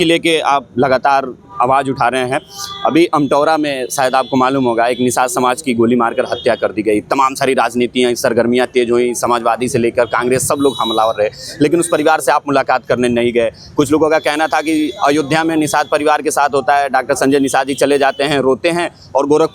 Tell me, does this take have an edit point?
no; 0 cuts

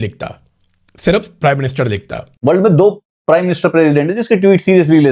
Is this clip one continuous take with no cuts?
no; 1 cut; at 2.4 s

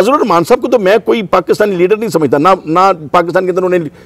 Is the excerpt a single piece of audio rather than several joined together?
yes; 0 cuts

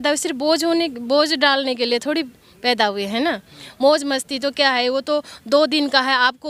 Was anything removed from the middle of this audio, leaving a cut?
no; 0 cuts

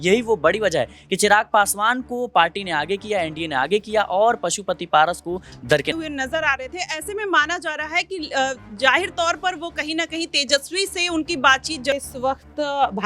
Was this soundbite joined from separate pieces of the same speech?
yes; 2 cuts; at 5.9 s, 11.9 s

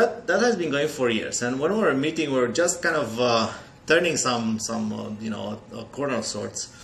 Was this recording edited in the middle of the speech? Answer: no; 0 cuts

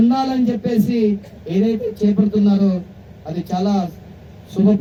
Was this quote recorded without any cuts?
yes; 0 cuts

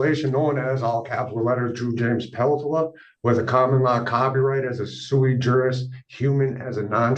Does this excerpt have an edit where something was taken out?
no; 0 cuts

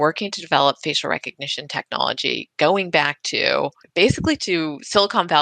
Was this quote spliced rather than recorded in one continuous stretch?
yes; 1 cut; at 3.8 s

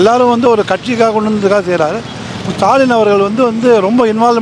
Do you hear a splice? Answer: no; 0 cuts

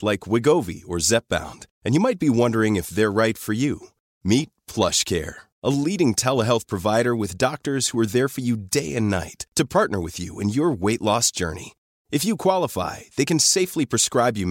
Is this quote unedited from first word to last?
yes; 0 cuts

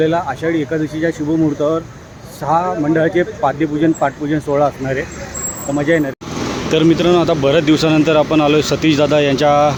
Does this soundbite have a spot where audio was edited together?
no; 0 cuts

